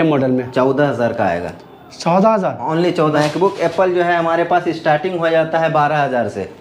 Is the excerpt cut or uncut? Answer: cut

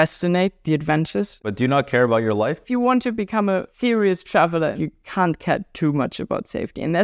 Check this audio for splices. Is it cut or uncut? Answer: cut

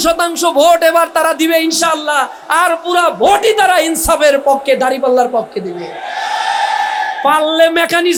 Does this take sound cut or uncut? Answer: uncut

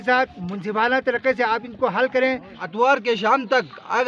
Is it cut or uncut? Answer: cut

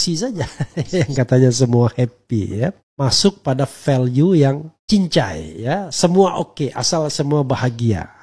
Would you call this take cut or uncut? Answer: cut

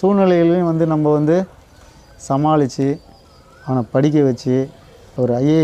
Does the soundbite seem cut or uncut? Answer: cut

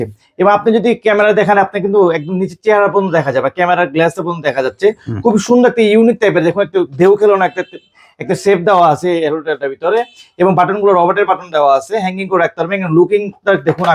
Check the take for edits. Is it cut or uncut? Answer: uncut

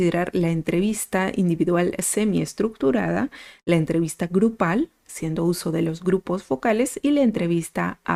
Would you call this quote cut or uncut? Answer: uncut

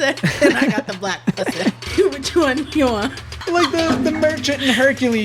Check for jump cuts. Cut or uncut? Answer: cut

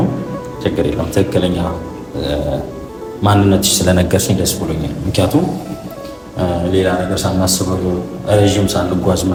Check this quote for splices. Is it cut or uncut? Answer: uncut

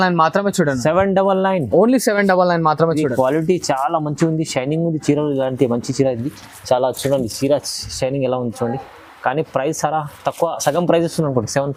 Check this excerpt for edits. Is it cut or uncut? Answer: uncut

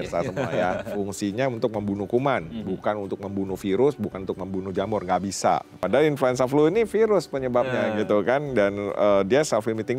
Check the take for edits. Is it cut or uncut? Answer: cut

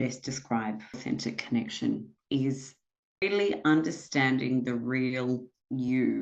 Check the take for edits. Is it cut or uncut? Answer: cut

